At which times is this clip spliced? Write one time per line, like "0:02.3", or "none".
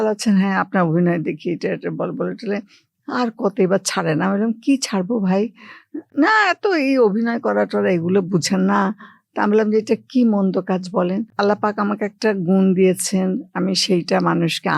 none